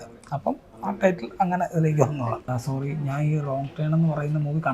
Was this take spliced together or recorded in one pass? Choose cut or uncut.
cut